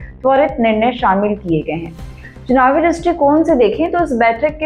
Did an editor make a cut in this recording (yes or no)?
no